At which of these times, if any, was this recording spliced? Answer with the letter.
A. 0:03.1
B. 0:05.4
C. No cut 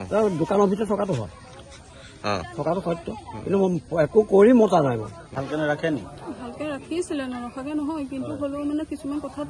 B